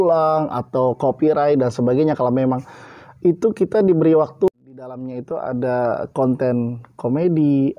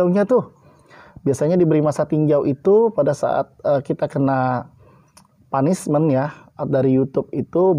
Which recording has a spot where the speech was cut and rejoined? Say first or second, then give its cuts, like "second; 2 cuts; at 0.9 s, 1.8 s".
first; 1 cut; at 4.5 s